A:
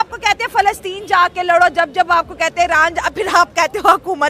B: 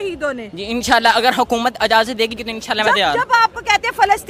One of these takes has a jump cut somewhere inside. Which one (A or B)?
B